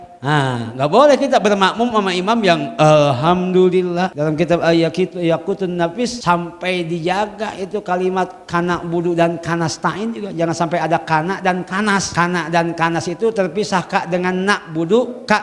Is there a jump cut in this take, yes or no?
yes